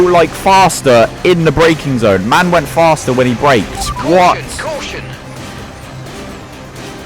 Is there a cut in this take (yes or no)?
yes